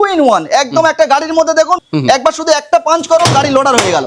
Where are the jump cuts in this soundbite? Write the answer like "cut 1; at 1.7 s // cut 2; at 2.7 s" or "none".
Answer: cut 1; at 1.9 s

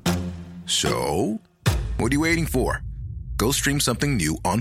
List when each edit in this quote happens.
none

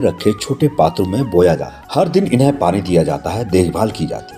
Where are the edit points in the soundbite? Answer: none

